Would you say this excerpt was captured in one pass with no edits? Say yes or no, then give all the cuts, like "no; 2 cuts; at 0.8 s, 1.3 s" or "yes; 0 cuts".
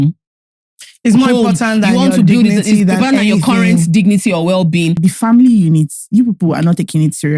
no; 1 cut; at 5.0 s